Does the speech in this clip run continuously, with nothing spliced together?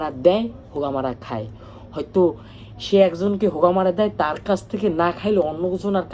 yes; 0 cuts

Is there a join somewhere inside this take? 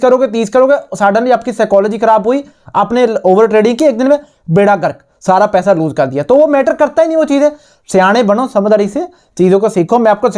no; 0 cuts

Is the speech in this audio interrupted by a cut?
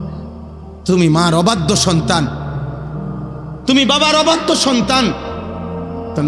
yes; 3 cuts; at 0.8 s, 2.3 s, 3.6 s

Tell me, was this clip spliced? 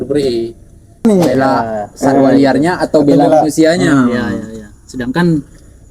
yes; 1 cut; at 1.0 s

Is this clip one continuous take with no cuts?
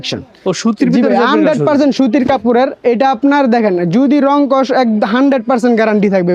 yes; 0 cuts

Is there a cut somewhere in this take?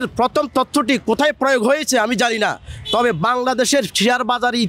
no; 0 cuts

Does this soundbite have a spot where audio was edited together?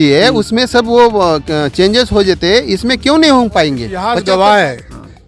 yes; 1 cut; at 3.9 s

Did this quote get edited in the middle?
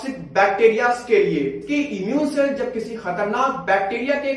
yes; 1 cut; at 1.6 s

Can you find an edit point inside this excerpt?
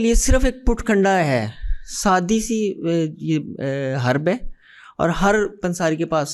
no; 0 cuts

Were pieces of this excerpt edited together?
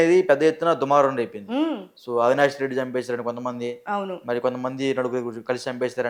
no; 0 cuts

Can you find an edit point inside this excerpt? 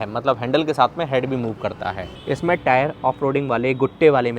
yes; 1 cut; at 2.1 s

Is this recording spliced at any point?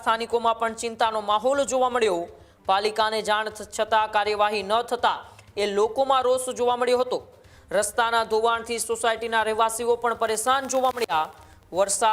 no; 0 cuts

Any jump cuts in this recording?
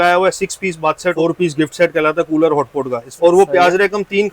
yes; 2 cuts; at 1.2 s, 3.1 s

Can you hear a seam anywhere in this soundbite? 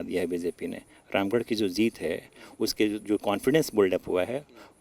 no; 0 cuts

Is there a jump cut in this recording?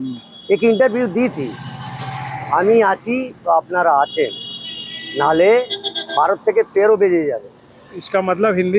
no; 0 cuts

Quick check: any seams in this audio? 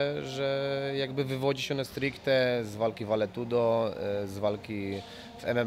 no; 0 cuts

